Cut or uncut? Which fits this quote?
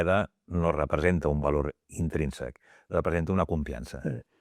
uncut